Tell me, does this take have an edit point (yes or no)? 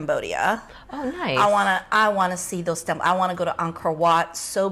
no